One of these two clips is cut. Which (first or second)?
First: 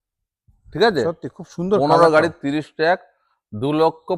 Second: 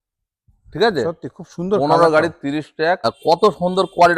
second